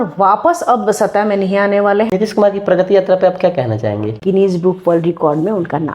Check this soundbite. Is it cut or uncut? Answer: cut